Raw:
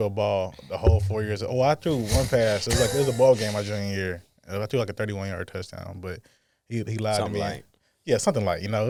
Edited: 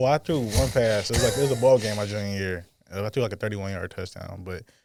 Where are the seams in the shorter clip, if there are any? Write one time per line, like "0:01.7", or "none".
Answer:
none